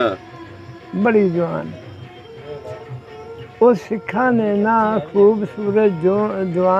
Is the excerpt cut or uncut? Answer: uncut